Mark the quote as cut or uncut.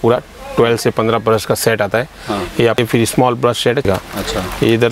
cut